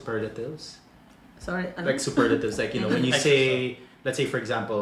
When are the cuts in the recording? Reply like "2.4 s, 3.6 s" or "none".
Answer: none